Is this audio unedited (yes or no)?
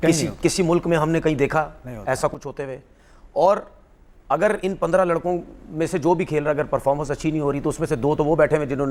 yes